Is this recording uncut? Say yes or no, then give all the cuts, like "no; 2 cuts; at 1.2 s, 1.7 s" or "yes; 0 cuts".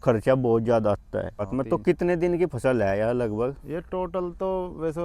no; 1 cut; at 1.5 s